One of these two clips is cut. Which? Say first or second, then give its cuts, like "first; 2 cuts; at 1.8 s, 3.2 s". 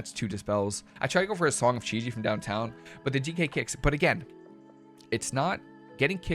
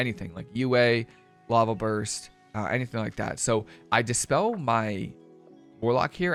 first; 1 cut; at 0.9 s